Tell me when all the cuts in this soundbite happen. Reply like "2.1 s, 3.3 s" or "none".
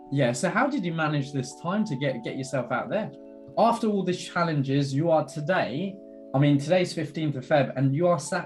3.4 s

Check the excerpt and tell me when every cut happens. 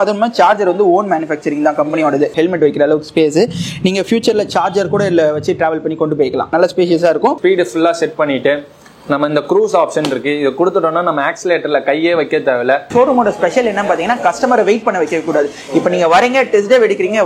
2.3 s, 7.4 s, 12.9 s

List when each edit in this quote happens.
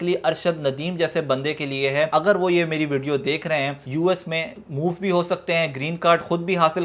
2.1 s, 3.8 s

